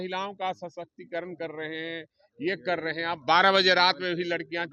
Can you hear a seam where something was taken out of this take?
no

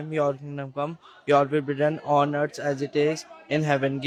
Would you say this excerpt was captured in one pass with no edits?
yes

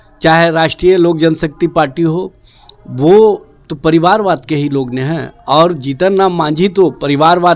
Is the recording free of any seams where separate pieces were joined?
yes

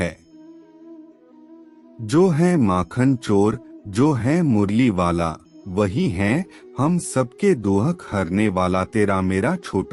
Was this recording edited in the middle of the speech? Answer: no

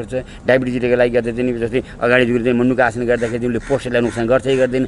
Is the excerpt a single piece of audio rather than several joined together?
yes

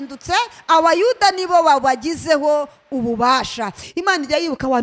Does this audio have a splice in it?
yes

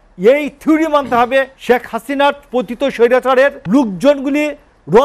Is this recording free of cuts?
no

